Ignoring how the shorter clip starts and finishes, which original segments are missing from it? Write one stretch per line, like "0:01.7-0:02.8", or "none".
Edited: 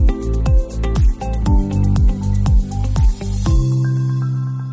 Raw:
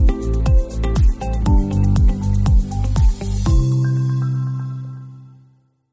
none